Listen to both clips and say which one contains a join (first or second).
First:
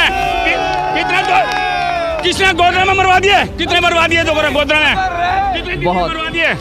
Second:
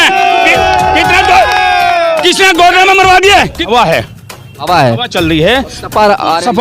second